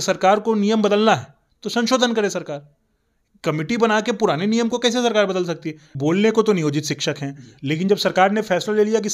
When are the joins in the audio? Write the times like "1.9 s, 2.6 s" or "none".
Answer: 5.9 s

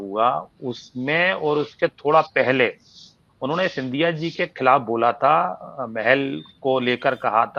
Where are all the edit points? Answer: none

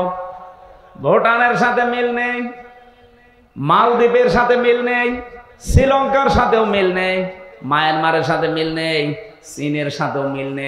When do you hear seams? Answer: none

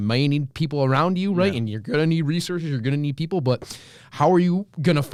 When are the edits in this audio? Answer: none

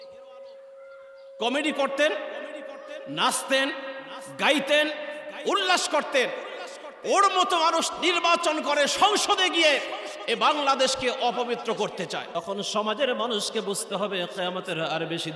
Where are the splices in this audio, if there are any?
12.3 s

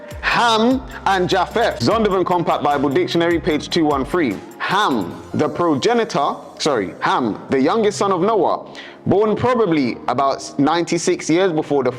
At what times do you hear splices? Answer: 1.8 s

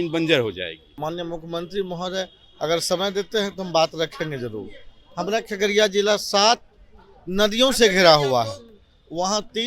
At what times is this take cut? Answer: 1.0 s

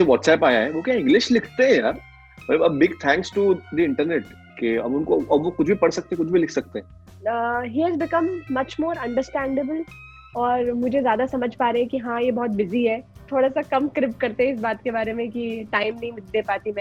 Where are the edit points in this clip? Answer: 7.1 s, 13.2 s

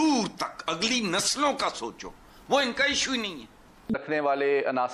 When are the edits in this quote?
none

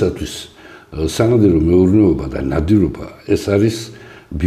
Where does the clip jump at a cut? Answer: none

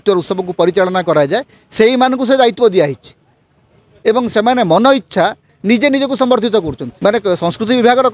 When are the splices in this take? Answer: 6.8 s

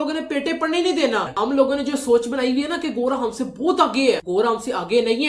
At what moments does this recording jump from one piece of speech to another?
1.3 s

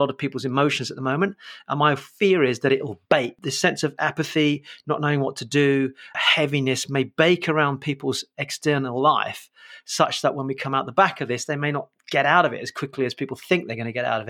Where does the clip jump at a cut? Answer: 3.4 s

